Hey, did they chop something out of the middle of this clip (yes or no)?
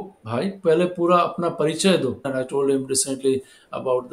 yes